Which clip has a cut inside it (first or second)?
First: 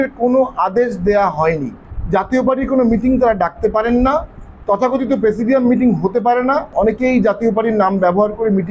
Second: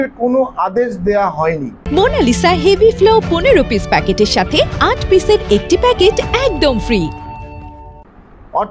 first